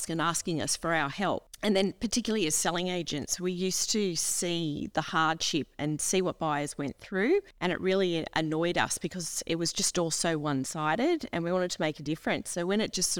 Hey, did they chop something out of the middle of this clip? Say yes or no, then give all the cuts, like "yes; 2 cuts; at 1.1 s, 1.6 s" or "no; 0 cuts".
yes; 2 cuts; at 1.5 s, 7.5 s